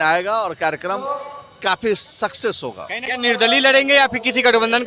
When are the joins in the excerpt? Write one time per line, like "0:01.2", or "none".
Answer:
0:03.0